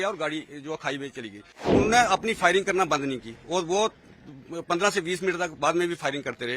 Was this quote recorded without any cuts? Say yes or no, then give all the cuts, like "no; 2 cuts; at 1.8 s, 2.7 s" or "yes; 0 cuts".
no; 1 cut; at 1.6 s